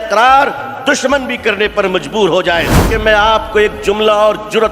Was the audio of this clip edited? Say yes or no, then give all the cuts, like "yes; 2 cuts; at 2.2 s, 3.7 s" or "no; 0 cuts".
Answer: yes; 1 cut; at 2.8 s